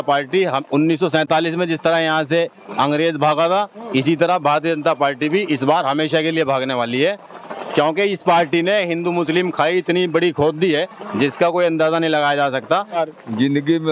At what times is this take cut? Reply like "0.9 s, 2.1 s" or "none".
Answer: 13.0 s